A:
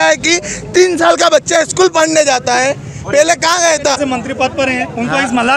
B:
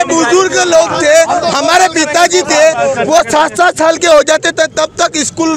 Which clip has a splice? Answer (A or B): A